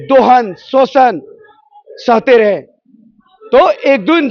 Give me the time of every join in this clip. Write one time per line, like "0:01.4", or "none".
none